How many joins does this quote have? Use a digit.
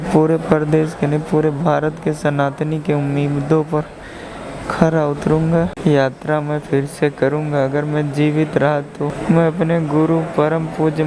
2